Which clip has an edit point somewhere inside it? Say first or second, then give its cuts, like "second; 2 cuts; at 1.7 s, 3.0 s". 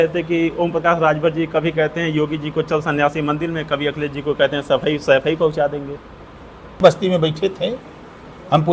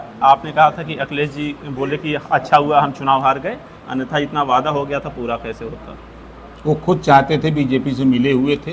first; 1 cut; at 6.8 s